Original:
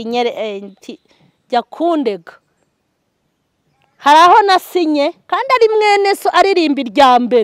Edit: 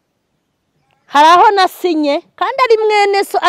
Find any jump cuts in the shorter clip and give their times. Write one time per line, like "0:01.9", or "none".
none